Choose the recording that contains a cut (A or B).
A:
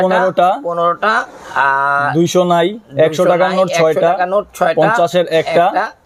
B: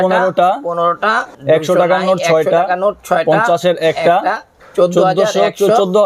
B